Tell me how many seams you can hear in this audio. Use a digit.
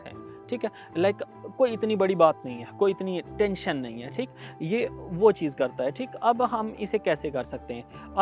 0